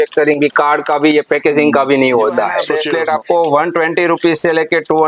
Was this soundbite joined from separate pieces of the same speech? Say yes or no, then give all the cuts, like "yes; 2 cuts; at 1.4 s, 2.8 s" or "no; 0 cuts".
yes; 1 cut; at 2.7 s